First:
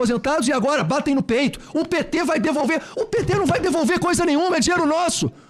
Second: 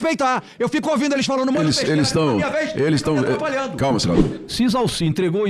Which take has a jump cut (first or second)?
second